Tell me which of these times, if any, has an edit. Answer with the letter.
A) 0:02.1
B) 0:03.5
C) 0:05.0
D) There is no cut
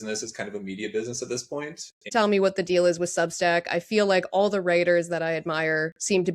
A